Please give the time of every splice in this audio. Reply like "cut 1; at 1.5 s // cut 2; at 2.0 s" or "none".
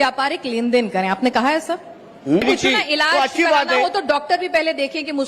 cut 1; at 2.4 s

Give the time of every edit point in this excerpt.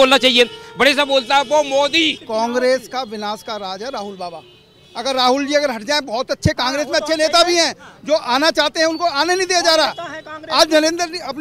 cut 1; at 2.2 s

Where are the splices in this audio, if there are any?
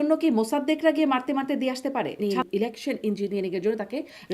cut 1; at 2.2 s

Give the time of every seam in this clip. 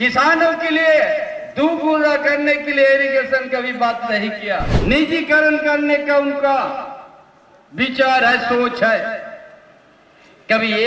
cut 1; at 4.7 s

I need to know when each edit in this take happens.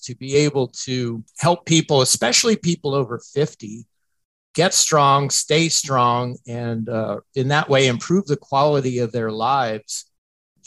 cut 1; at 1.3 s

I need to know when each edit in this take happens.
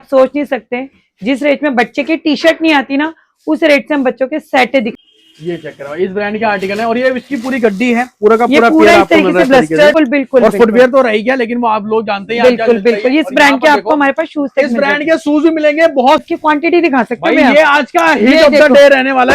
cut 1; at 5.0 s // cut 2; at 9.9 s // cut 3; at 16.2 s

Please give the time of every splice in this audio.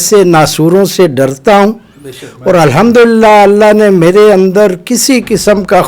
none

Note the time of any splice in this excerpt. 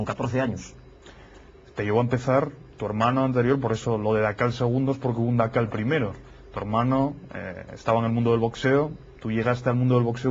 none

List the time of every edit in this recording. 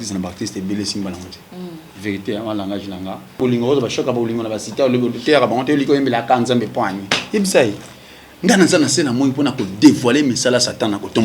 cut 1; at 3.4 s

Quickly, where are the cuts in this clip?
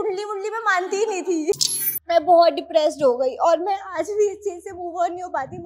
cut 1; at 1.5 s

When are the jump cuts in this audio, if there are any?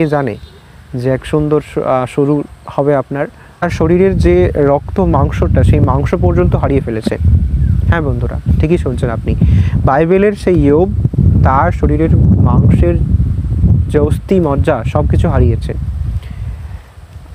cut 1; at 3.6 s

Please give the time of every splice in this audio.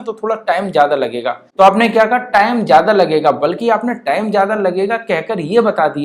cut 1; at 1.4 s

